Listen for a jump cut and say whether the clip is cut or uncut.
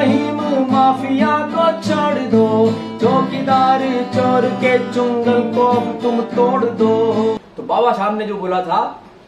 cut